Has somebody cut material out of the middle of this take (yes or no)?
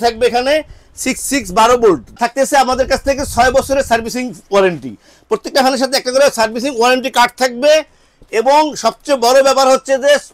yes